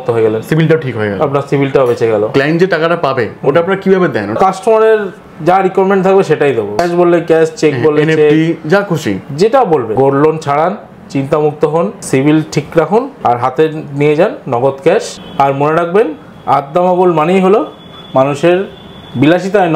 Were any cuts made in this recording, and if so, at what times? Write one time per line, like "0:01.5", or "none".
0:02.3
0:04.4
0:06.8
0:09.9
0:12.0
0:13.1
0:15.2